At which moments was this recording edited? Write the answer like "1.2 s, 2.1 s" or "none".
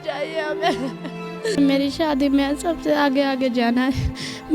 1.6 s